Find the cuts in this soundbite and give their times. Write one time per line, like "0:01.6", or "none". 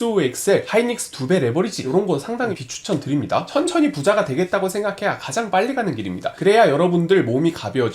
0:01.9
0:03.5

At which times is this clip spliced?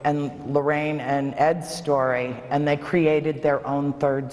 none

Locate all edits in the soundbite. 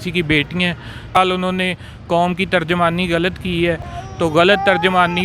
0:01.2

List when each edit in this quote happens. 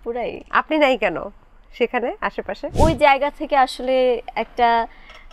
0:02.7

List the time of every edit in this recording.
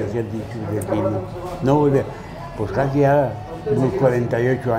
none

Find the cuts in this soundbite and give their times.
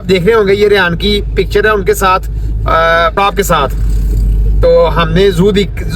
none

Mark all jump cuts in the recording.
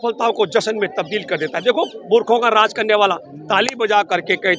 none

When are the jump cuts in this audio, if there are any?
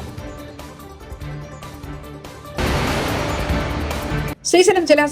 0:02.5
0:04.2

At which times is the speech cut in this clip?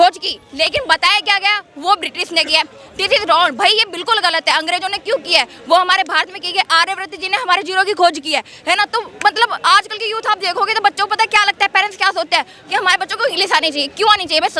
none

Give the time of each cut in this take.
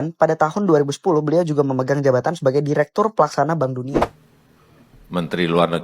0:03.9

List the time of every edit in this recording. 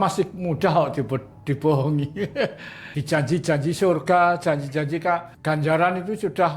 0:02.9
0:05.3

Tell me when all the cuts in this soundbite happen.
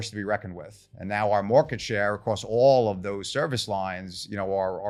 none

